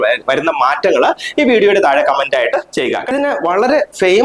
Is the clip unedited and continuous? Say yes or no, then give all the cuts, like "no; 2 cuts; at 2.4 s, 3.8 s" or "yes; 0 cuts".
no; 1 cut; at 3.1 s